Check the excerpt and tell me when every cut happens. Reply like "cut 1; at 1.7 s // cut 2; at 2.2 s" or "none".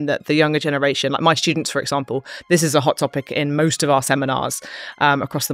none